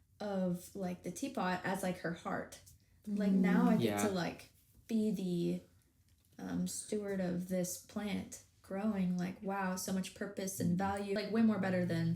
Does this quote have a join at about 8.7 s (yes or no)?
no